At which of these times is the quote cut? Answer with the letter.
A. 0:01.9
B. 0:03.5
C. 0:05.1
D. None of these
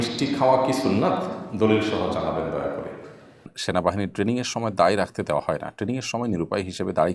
B